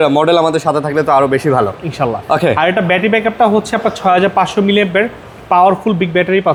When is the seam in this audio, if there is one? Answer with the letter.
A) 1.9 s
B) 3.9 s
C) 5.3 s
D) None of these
D